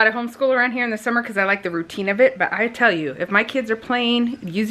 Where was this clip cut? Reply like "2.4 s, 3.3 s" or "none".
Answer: none